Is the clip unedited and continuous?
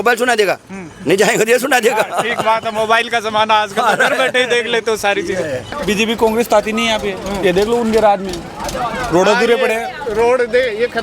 no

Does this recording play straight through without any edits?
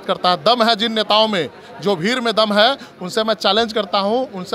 yes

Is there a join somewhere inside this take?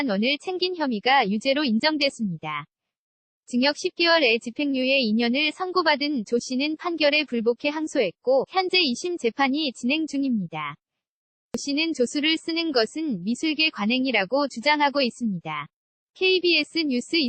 yes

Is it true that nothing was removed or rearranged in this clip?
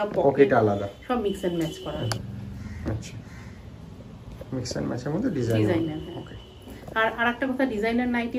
no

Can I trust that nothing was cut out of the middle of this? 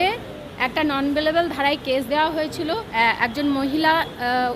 no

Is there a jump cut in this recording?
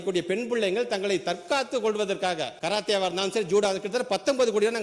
yes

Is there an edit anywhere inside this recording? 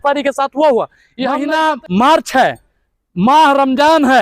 yes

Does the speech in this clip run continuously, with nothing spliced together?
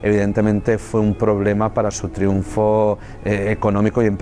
no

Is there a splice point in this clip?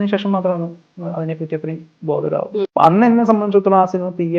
yes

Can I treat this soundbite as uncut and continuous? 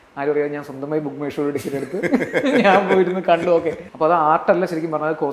no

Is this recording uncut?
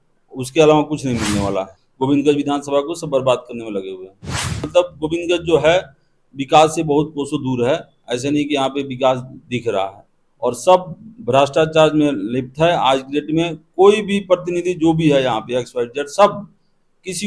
no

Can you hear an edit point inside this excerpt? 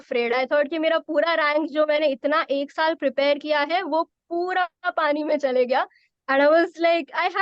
no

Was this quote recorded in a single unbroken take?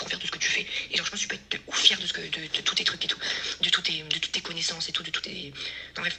yes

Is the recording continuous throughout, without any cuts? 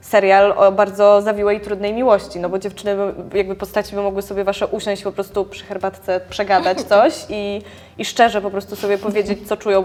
yes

